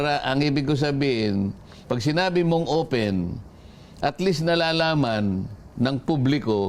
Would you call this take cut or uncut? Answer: uncut